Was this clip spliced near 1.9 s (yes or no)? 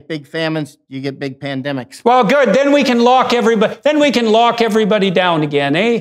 yes